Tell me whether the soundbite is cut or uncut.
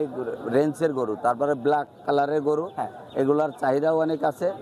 uncut